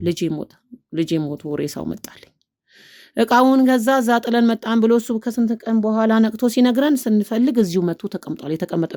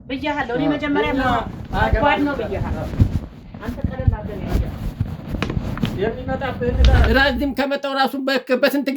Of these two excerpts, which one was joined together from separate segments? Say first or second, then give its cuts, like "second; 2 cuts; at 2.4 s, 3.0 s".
second; 1 cut; at 7.0 s